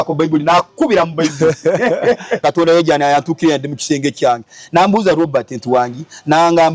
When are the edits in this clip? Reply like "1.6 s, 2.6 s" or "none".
2.4 s